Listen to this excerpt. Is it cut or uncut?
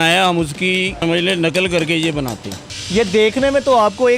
cut